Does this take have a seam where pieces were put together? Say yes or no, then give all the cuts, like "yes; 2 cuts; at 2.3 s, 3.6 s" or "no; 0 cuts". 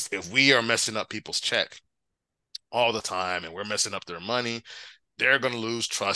no; 0 cuts